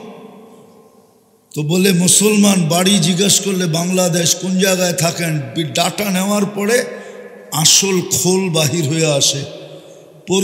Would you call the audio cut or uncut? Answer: uncut